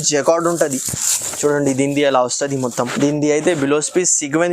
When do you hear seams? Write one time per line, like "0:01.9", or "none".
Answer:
0:02.9